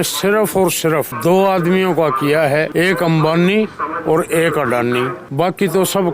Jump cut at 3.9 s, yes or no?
no